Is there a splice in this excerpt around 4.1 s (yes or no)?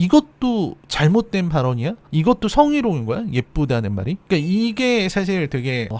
yes